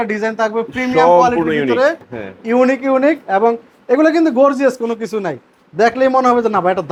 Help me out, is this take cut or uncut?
uncut